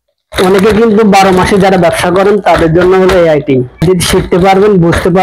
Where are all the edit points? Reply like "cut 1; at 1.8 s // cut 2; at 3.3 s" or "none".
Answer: cut 1; at 3.8 s